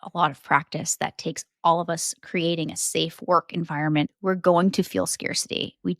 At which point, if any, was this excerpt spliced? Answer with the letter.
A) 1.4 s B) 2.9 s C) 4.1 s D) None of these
C